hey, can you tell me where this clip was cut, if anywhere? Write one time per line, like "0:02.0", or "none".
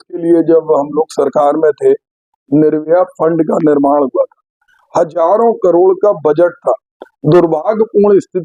none